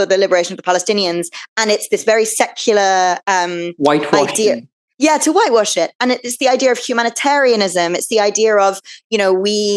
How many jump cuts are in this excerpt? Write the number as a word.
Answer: zero